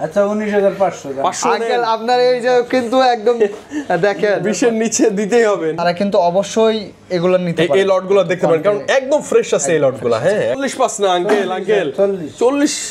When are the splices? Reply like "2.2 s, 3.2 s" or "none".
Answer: 5.8 s, 10.6 s